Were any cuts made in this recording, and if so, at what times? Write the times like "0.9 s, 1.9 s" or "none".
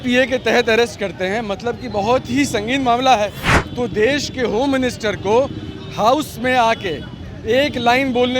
none